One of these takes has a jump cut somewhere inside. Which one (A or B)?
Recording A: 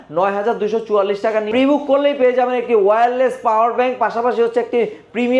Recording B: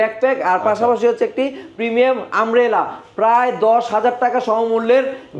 A